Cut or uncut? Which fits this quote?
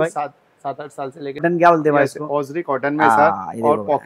cut